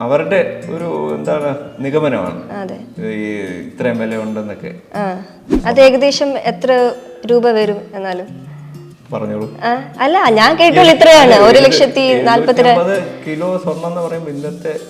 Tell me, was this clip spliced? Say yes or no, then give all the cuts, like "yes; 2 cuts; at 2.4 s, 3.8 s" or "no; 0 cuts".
yes; 1 cut; at 5.5 s